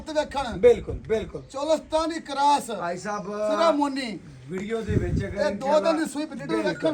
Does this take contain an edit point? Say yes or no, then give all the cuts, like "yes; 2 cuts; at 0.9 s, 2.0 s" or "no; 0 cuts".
no; 0 cuts